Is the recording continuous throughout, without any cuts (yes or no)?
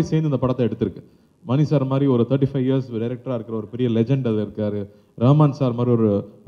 yes